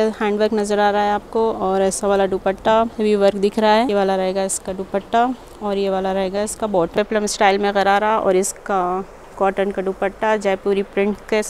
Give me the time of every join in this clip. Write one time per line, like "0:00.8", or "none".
0:02.9
0:03.9
0:06.9